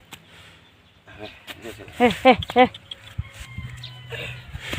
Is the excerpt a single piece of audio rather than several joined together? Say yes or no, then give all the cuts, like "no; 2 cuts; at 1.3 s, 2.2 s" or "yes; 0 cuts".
yes; 0 cuts